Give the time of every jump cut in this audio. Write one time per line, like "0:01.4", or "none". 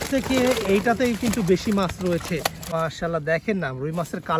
0:02.6